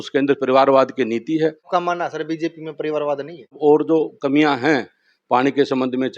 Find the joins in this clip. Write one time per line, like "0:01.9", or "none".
0:01.6
0:03.6